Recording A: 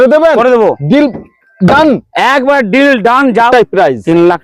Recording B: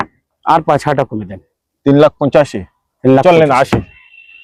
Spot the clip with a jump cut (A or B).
A